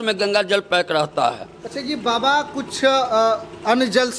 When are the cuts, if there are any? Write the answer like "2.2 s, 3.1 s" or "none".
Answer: none

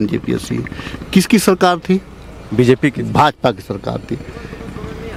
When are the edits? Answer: none

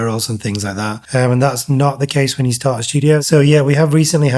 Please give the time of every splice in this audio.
3.2 s

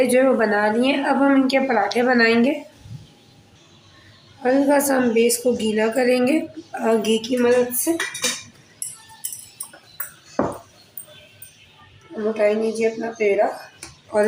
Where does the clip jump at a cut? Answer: none

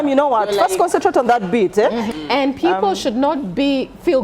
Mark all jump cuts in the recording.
2.1 s

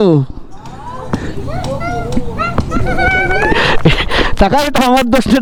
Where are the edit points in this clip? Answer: none

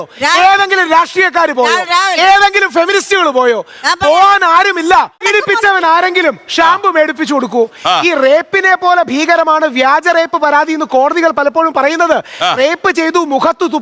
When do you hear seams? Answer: 5.2 s

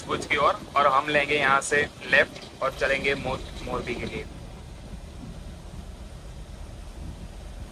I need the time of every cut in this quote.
none

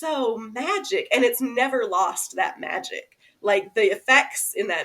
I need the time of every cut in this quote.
none

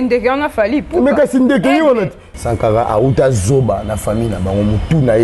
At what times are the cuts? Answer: 2.3 s

